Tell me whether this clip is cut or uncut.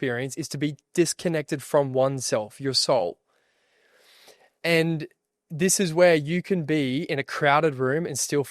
uncut